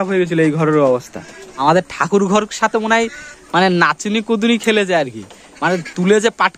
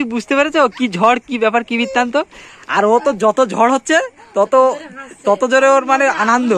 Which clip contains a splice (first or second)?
first